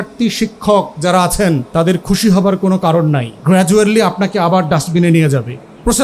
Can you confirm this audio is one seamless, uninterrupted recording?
no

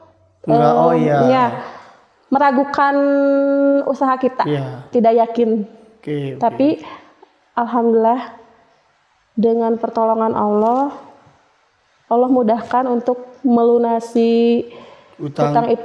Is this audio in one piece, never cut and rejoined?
yes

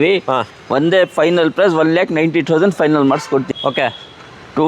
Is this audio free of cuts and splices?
no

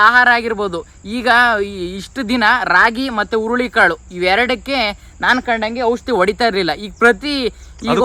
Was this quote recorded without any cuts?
yes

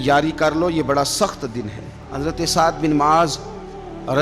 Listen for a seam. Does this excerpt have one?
yes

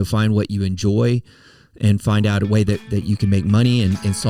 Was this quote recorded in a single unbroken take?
yes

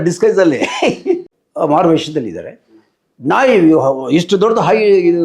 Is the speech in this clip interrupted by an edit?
yes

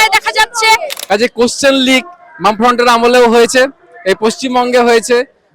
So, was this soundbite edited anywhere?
yes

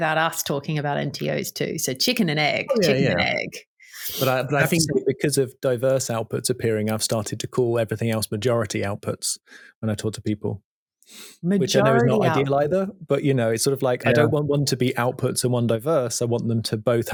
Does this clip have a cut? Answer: no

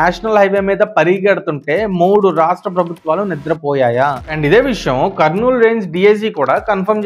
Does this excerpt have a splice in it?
yes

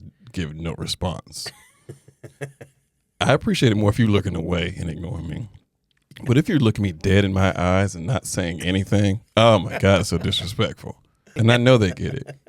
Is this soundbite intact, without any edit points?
no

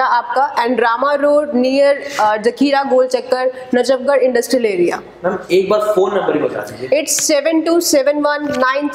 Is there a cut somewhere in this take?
no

